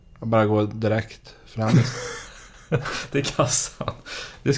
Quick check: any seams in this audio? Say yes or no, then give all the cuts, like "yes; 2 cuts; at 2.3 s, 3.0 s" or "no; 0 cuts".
no; 0 cuts